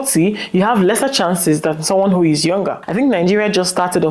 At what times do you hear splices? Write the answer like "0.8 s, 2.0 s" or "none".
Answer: 2.8 s

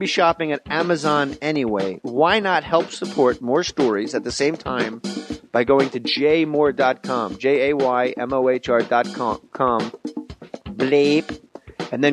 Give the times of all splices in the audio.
6.1 s

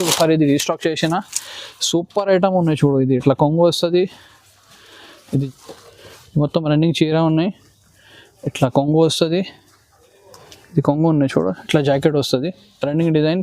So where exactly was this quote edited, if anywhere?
5.4 s

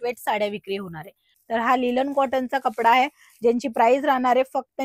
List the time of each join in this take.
1.3 s

